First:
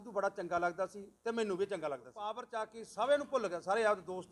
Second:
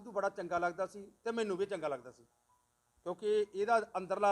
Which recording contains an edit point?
first; 1 cut; at 2.5 s

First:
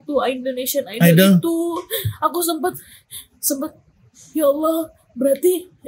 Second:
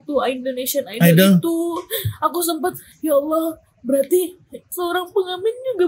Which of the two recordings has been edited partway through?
second; 2 cuts; at 2.9 s, 4.6 s

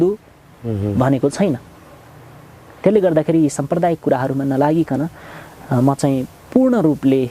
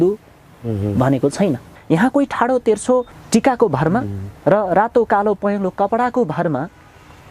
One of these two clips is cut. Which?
second; 2 cuts; at 1.7 s, 3.2 s

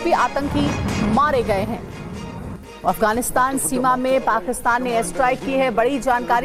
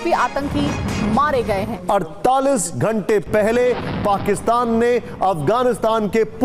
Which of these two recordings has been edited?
second; 1 cut; at 1.8 s

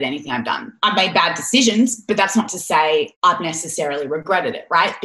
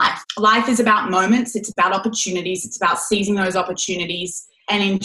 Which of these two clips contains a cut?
first; 1 cut; at 3.1 s

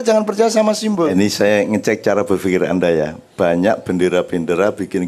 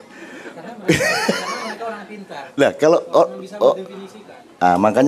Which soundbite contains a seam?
first; 1 cut; at 1.1 s

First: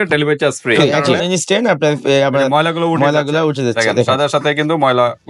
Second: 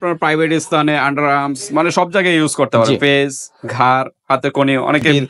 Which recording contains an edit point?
first; 1 cut; at 1.0 s

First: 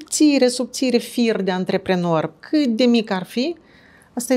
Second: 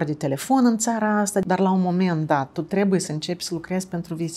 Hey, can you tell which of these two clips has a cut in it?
second; 1 cut; at 1.4 s

